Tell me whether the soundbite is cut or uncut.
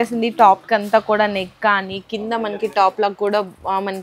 uncut